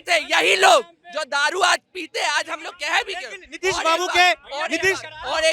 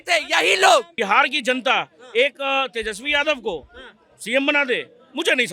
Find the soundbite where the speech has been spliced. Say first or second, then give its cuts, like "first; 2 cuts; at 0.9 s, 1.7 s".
second; 1 cut; at 0.9 s